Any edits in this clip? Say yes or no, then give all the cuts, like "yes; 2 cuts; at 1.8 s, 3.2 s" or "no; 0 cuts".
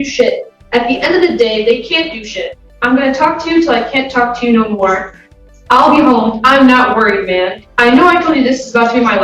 no; 0 cuts